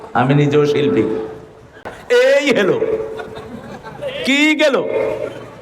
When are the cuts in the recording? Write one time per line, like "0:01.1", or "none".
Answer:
0:01.9